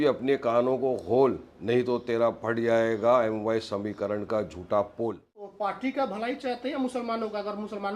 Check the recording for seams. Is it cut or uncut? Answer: cut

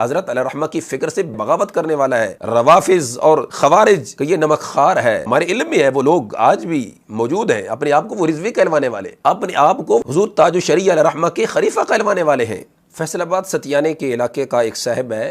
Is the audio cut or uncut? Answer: cut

